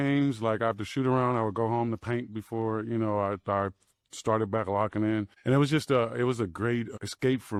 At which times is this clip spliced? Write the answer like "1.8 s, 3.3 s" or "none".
none